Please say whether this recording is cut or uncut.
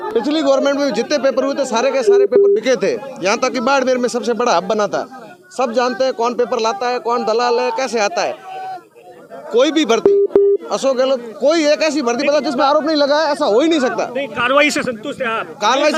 uncut